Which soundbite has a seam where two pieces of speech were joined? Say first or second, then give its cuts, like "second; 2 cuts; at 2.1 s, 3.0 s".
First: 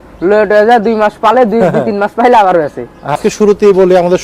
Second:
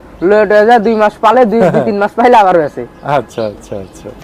first; 1 cut; at 3.2 s